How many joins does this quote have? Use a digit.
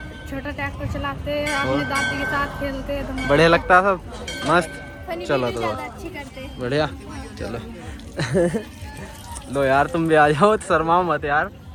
0